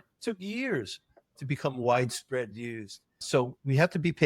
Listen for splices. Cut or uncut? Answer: cut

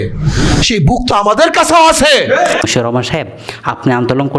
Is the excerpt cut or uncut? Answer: cut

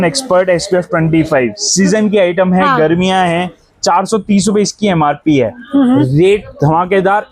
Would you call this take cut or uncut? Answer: uncut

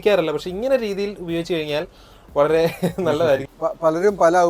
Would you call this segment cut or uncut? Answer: cut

